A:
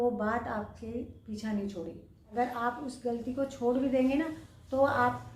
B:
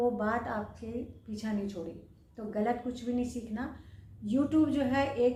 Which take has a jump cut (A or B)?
A